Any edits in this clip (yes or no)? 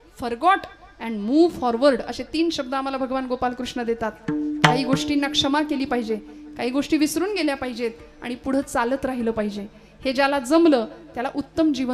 no